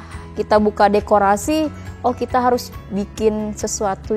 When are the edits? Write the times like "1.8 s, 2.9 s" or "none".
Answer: none